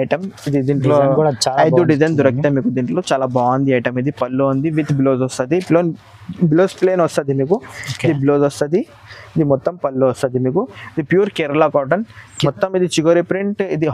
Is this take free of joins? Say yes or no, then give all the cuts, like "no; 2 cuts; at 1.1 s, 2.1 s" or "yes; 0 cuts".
no; 1 cut; at 12.2 s